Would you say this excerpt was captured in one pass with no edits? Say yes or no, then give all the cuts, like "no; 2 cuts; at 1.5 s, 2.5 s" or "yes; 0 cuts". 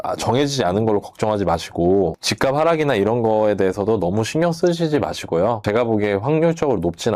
no; 2 cuts; at 2.2 s, 5.6 s